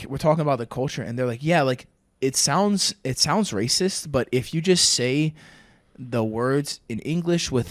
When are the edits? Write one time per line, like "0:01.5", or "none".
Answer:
none